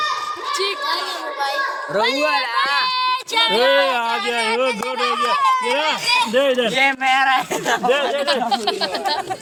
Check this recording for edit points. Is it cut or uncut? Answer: uncut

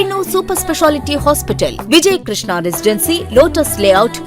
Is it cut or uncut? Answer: uncut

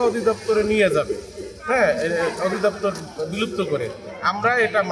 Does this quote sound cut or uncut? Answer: uncut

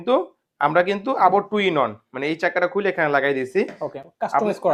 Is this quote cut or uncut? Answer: uncut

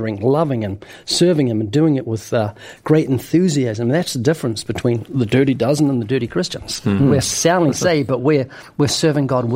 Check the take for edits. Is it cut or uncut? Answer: uncut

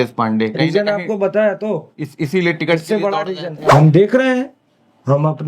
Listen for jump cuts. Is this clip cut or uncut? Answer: cut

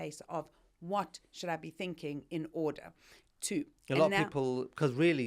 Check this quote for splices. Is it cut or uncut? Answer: uncut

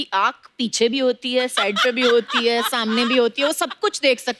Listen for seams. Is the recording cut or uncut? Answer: uncut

